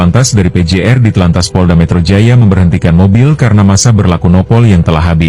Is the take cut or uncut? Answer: uncut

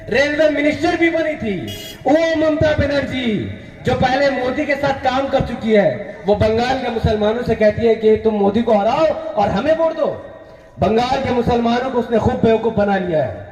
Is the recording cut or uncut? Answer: uncut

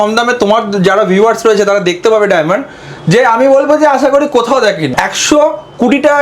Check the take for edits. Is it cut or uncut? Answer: cut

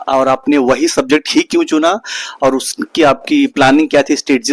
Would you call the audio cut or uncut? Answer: uncut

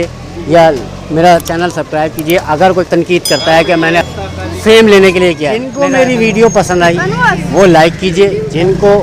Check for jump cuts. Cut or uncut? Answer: cut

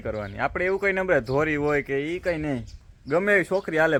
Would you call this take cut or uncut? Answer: uncut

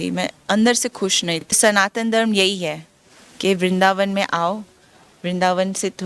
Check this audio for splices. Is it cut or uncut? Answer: cut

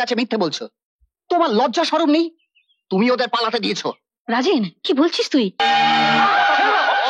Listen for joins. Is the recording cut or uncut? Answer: cut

